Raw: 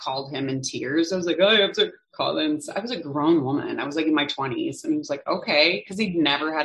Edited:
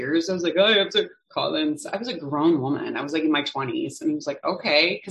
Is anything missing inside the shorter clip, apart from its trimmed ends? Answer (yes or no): no